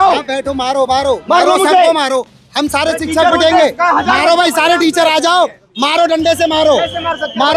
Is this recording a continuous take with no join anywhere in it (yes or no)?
yes